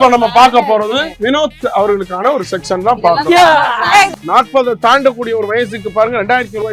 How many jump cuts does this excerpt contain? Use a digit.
2